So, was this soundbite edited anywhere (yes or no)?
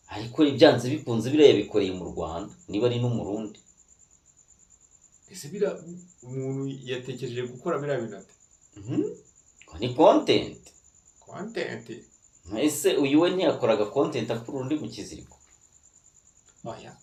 no